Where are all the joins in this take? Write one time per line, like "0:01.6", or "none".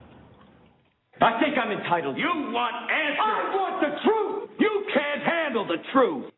0:04.9